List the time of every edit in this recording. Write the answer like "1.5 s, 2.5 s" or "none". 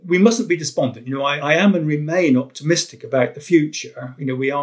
1.4 s